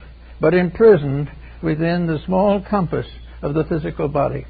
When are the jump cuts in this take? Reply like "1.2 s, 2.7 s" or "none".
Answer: none